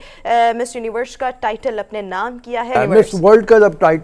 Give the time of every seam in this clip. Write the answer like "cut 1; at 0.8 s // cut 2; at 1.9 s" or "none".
cut 1; at 2.8 s